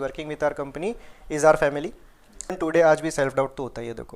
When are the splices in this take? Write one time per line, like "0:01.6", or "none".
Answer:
0:02.6